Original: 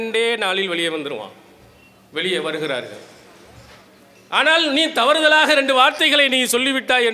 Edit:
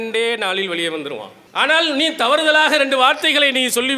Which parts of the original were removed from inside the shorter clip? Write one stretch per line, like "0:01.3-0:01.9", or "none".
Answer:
0:01.4-0:04.1